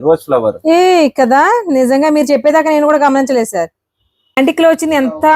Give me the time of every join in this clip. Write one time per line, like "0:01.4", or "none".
0:04.4